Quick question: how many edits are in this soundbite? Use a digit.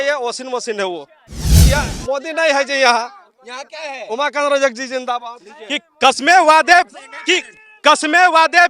2